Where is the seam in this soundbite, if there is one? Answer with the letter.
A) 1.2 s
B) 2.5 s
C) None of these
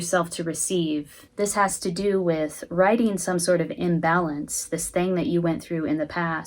A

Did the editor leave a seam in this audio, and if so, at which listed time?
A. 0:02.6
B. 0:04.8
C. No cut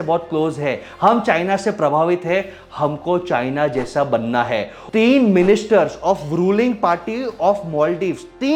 B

